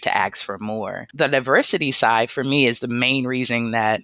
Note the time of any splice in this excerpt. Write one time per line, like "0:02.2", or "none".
0:01.1